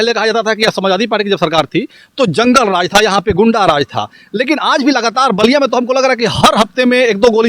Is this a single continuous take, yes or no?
yes